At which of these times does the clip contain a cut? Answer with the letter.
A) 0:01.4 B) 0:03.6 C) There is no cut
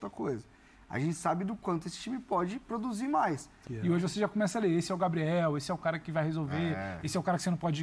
B